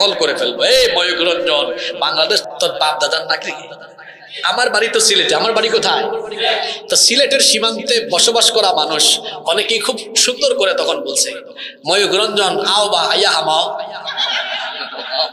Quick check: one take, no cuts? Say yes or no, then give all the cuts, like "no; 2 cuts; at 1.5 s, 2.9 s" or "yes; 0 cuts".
no; 1 cut; at 2.4 s